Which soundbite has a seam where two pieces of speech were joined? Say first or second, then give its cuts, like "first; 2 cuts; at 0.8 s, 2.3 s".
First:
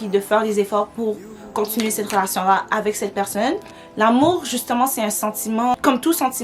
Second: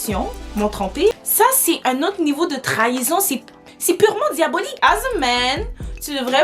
second; 2 cuts; at 1.1 s, 4.8 s